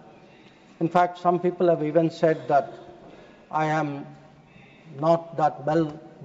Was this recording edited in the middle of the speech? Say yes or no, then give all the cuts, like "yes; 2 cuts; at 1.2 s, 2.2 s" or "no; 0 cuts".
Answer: no; 0 cuts